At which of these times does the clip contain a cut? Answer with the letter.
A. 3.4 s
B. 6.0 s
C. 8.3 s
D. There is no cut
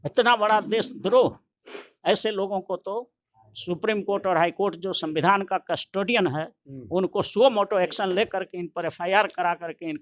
D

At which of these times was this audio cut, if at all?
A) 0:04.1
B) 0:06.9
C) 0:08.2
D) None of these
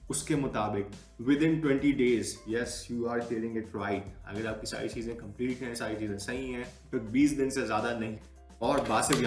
C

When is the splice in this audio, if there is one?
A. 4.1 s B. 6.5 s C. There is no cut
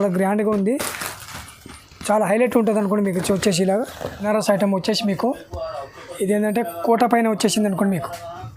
A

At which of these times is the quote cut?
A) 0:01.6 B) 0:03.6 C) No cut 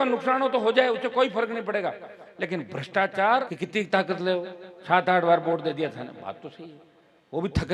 B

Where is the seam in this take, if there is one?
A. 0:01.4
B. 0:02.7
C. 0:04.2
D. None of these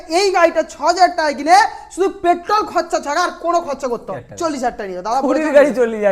C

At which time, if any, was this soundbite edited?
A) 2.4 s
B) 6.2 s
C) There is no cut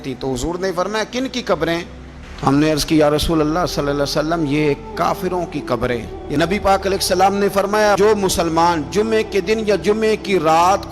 B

